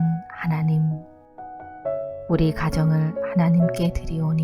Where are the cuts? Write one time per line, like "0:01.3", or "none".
0:01.0
0:02.3